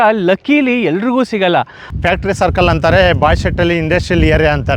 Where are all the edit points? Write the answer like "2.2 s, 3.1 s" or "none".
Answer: 1.8 s